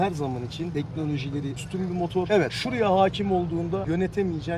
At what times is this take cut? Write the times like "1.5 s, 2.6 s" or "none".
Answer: none